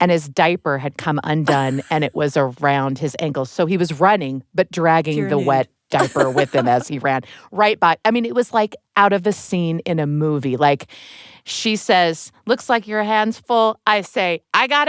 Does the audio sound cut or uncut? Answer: uncut